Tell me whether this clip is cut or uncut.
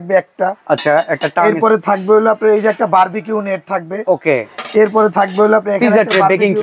uncut